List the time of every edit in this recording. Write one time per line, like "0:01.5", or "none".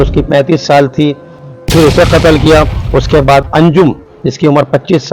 0:01.4
0:04.2